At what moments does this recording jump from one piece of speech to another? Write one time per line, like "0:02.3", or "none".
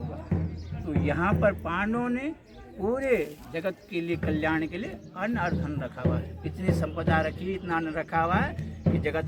none